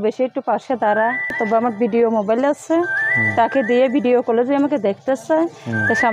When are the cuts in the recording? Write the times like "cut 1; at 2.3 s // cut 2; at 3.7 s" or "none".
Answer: cut 1; at 1.4 s